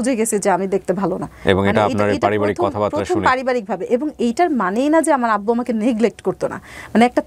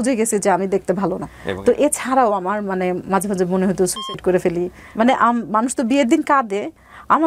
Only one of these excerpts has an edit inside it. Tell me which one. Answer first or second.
second